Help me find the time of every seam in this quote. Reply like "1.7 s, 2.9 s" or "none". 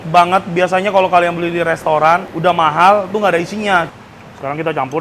2.3 s, 3.9 s